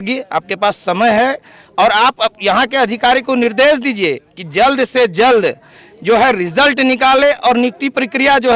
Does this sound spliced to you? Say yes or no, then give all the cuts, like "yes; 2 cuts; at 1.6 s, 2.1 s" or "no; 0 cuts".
no; 0 cuts